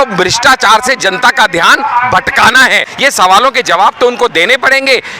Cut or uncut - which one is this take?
cut